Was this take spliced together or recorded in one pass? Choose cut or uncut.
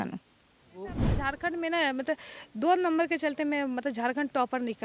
cut